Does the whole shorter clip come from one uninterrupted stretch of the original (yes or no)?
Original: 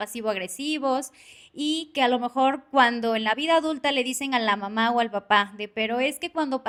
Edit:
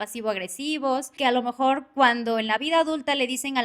no